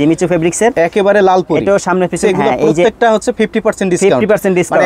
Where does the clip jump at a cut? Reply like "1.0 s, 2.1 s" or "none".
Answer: 2.2 s